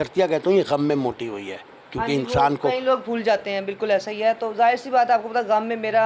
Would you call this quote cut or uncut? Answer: uncut